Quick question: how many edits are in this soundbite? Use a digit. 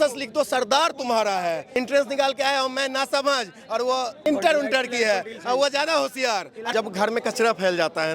3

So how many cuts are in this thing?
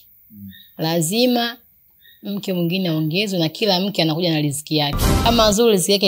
1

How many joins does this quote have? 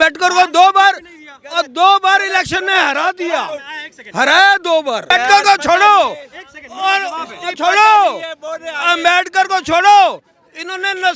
1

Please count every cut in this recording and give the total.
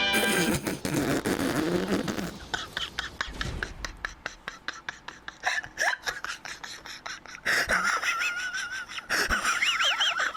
0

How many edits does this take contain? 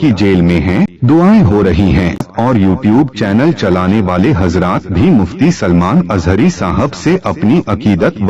2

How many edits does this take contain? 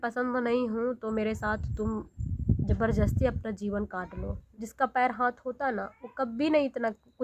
1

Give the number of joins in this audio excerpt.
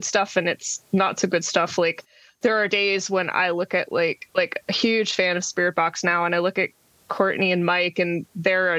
0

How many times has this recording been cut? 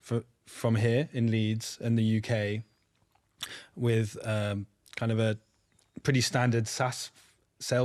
0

